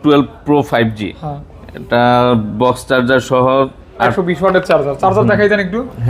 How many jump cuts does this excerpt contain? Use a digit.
1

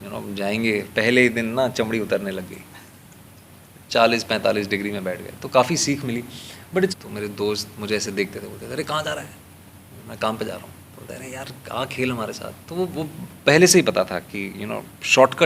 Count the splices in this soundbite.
2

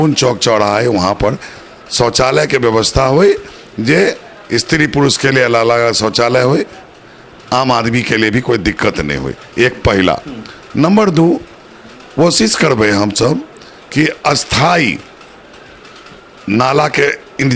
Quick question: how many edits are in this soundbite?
0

